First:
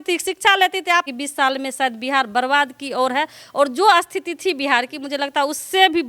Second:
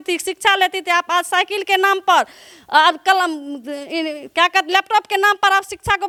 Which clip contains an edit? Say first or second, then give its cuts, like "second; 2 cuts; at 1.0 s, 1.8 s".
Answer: first; 1 cut; at 1.1 s